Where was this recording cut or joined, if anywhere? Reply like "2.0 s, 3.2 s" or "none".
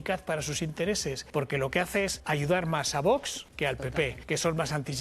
1.2 s, 2.2 s, 3.9 s